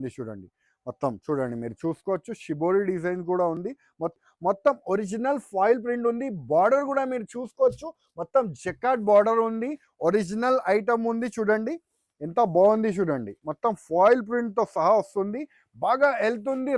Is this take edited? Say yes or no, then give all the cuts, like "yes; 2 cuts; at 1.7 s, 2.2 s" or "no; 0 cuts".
yes; 1 cut; at 4.1 s